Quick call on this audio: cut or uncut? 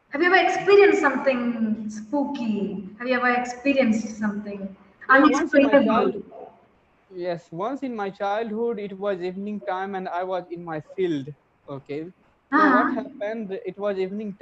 uncut